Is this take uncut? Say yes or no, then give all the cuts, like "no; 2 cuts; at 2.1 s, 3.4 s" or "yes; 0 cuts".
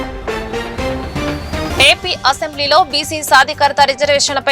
yes; 0 cuts